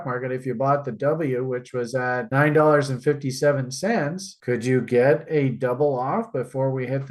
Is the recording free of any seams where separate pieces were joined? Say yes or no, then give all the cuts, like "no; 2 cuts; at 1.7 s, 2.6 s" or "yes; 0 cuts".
yes; 0 cuts